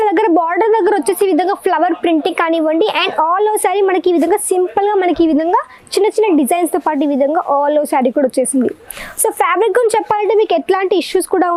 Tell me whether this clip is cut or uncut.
uncut